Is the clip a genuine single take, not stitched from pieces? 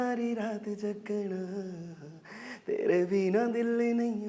yes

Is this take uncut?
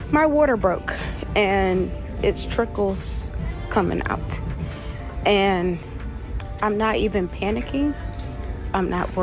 yes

